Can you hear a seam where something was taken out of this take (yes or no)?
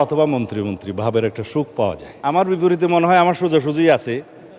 yes